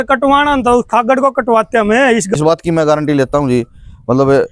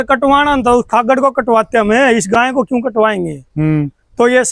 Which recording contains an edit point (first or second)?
first